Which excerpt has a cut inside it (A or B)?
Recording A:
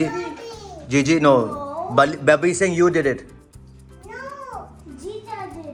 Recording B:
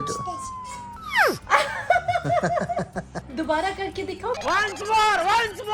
B